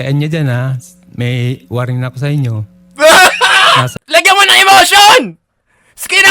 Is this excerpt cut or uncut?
cut